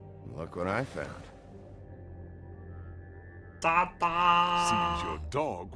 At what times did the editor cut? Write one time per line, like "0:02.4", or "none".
0:03.9